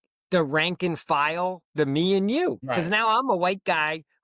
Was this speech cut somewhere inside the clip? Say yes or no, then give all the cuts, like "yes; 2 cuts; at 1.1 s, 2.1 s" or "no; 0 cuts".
yes; 1 cut; at 2.6 s